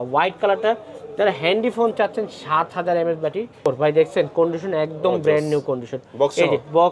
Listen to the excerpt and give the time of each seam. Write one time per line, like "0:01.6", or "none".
0:03.7